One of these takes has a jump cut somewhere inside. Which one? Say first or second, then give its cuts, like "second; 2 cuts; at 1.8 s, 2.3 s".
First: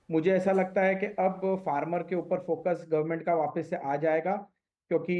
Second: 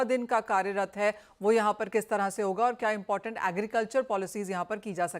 second; 1 cut; at 1.8 s